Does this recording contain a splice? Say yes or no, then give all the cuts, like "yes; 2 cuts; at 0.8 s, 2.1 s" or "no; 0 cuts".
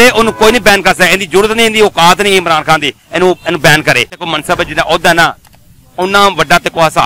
yes; 1 cut; at 4.3 s